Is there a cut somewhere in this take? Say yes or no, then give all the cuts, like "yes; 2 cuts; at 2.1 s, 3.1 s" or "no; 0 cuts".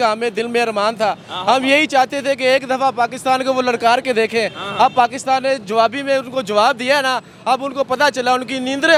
no; 0 cuts